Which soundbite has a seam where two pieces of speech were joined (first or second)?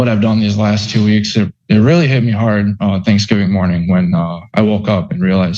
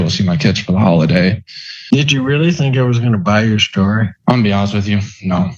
second